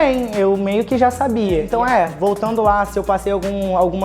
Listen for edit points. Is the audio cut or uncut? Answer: cut